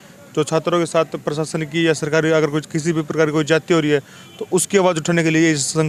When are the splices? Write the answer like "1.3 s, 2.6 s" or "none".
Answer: none